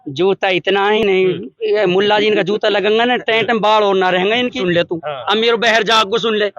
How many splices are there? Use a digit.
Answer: 2